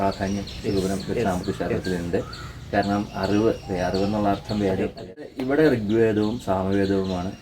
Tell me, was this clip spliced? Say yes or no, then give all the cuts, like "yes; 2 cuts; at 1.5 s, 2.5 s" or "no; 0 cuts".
yes; 1 cut; at 5.3 s